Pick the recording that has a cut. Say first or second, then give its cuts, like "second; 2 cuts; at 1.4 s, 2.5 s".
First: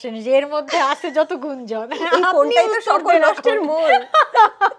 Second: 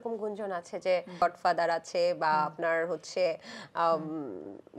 second; 1 cut; at 1.2 s